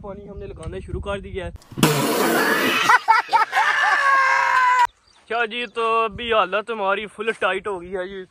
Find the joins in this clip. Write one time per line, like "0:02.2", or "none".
0:05.1